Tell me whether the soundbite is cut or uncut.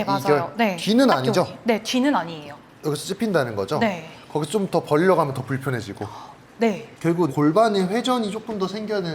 cut